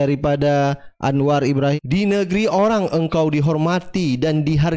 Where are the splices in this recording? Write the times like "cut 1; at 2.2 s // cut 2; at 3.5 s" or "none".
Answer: cut 1; at 1.8 s